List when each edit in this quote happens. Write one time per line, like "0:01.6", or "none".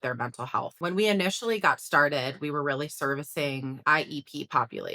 0:00.8
0:03.8